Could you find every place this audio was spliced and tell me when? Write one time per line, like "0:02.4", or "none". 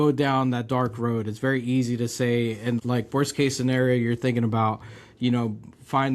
0:02.8